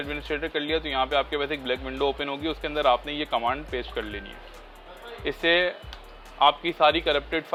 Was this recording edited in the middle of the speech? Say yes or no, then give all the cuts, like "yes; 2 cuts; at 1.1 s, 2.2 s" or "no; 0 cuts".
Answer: no; 0 cuts